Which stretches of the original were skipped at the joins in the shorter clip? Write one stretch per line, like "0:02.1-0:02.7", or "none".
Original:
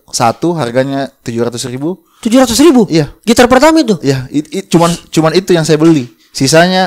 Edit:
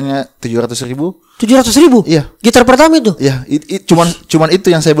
none